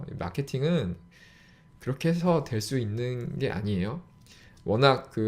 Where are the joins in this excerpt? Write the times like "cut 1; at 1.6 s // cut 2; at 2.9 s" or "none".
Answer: none